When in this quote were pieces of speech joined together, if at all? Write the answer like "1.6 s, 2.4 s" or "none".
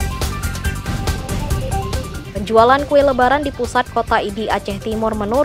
2.2 s